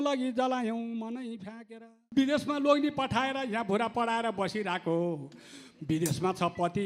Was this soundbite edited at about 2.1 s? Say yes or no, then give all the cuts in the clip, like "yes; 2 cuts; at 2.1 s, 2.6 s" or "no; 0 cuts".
yes; 1 cut; at 2.1 s